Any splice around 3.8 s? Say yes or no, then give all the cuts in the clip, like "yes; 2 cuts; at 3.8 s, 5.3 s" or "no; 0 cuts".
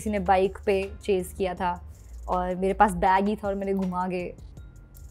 no; 0 cuts